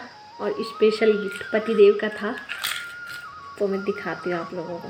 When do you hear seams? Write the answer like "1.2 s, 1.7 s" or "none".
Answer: none